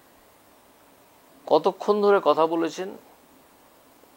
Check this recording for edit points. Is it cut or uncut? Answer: uncut